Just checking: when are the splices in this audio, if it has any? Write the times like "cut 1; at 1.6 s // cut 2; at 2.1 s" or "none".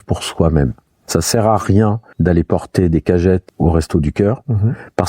cut 1; at 1.0 s // cut 2; at 2.1 s // cut 3; at 3.5 s